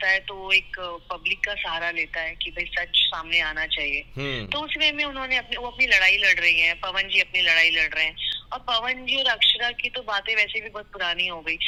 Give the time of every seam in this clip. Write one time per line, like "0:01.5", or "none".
none